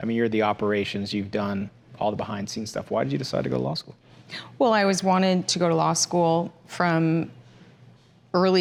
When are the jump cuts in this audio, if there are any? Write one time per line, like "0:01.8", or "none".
none